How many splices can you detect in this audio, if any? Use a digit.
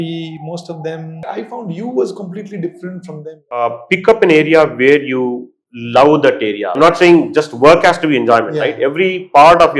3